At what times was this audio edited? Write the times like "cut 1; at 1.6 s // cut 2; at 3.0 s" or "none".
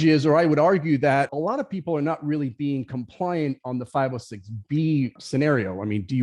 cut 1; at 1.3 s // cut 2; at 5.2 s